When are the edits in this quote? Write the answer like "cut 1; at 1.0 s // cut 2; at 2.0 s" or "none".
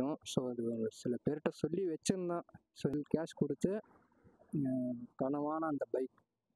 cut 1; at 2.9 s